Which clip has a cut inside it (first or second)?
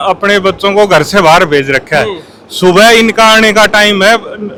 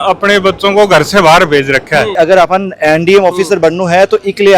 second